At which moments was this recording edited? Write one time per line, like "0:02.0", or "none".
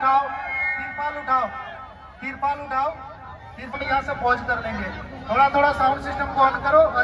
0:03.8